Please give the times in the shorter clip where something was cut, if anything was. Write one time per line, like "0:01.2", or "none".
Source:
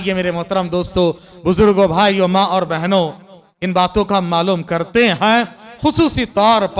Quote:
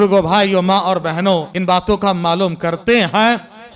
0:01.5